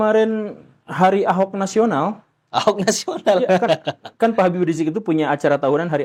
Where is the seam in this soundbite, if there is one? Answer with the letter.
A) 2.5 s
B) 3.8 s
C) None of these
C